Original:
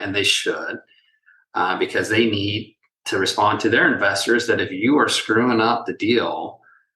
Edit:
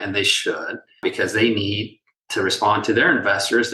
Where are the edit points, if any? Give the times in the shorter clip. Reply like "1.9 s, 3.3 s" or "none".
1.0 s